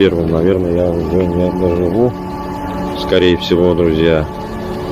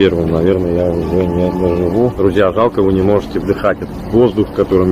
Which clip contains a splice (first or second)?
second